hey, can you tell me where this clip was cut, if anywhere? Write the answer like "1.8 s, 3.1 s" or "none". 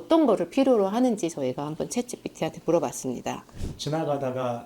3.5 s